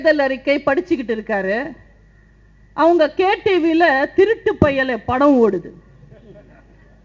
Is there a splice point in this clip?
no; 0 cuts

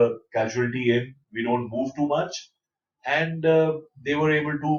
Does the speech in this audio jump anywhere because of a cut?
no; 0 cuts

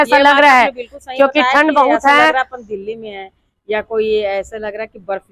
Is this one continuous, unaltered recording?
yes; 0 cuts

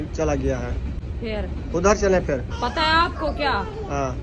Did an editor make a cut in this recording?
no; 0 cuts

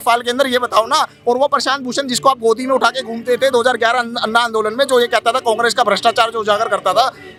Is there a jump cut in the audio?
no; 0 cuts

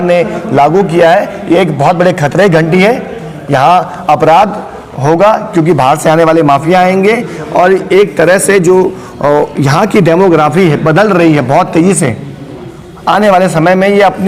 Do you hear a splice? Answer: no; 0 cuts

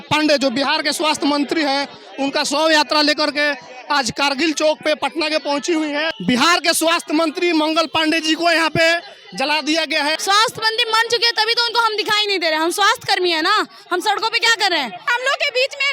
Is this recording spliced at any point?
yes; 3 cuts; at 6.1 s, 10.2 s, 15.1 s

